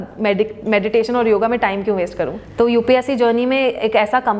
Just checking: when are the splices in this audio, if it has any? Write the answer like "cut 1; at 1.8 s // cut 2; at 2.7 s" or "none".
cut 1; at 2.4 s